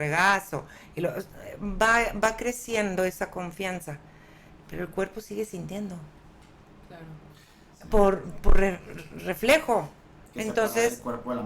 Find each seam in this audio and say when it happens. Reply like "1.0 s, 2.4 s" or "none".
none